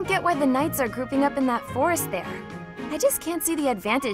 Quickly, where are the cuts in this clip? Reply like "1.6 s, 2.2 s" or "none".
none